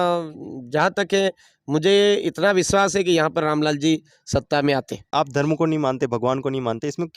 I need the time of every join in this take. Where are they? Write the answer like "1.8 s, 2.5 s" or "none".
5.1 s